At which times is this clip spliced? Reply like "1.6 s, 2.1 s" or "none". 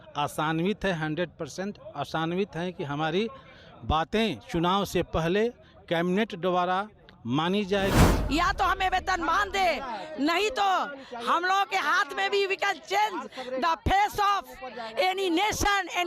8.1 s